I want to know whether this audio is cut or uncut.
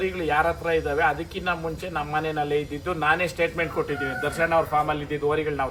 uncut